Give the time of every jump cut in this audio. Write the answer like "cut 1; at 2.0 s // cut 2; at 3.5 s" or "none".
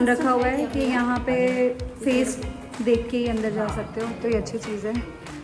none